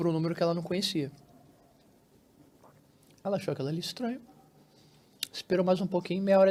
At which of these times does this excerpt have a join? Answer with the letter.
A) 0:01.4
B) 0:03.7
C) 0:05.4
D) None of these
D